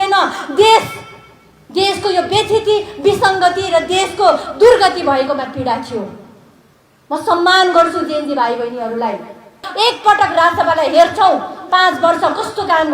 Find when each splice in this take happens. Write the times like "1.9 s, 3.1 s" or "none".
9.7 s